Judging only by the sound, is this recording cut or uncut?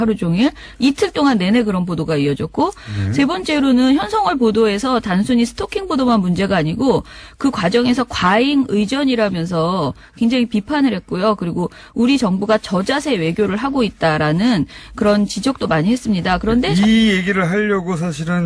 cut